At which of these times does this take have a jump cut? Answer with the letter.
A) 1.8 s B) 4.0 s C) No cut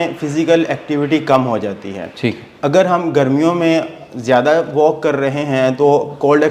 C